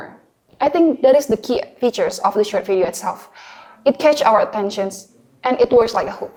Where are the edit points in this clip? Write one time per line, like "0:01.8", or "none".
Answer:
none